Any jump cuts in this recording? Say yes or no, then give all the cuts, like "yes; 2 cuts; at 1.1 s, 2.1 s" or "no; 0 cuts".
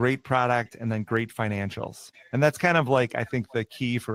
no; 0 cuts